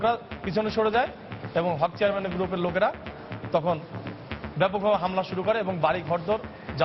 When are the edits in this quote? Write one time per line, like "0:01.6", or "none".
none